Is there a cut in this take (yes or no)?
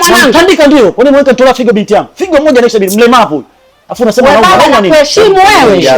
yes